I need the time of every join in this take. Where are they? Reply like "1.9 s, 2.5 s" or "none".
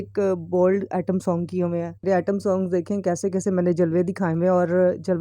1.9 s